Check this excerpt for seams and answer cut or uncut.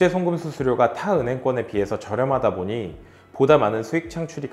uncut